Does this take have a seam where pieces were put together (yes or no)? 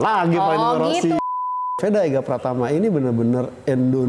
yes